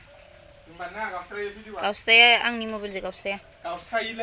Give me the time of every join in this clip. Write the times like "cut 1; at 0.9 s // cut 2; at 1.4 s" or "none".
none